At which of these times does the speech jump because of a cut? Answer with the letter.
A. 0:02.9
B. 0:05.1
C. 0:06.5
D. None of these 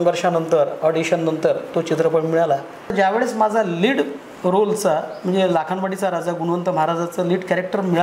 A